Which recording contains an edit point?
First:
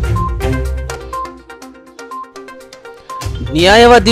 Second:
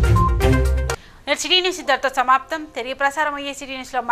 first; 1 cut; at 0.9 s

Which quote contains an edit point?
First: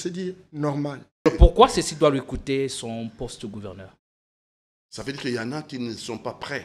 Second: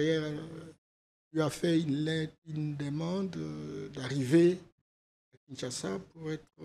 first; 1 cut; at 1.3 s

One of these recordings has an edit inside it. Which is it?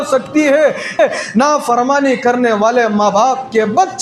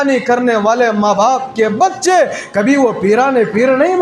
first; 1 cut; at 1.0 s

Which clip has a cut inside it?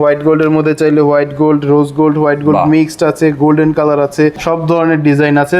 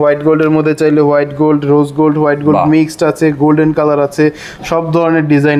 first; 1 cut; at 4.4 s

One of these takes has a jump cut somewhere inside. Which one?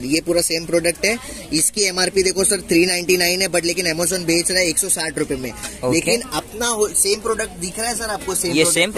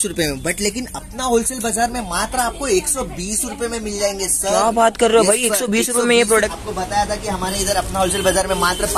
second; 1 cut; at 6.5 s

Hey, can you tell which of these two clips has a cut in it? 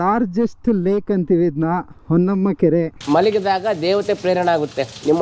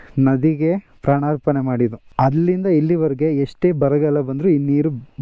first; 1 cut; at 3.0 s

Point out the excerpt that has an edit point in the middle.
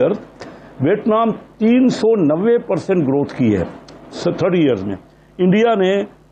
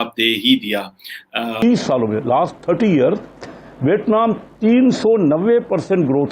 second; 1 cut; at 1.5 s

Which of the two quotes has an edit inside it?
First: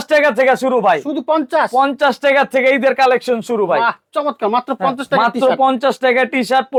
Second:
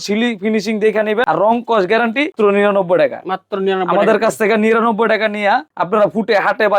second; 3 cuts; at 1.2 s, 2.3 s, 5.7 s

